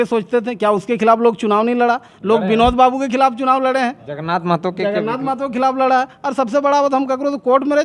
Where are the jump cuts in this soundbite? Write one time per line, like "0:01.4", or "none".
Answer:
none